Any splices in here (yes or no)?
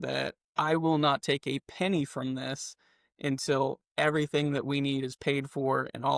no